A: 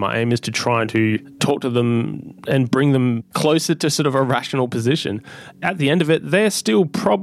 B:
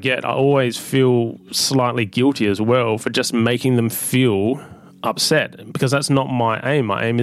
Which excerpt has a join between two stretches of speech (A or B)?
A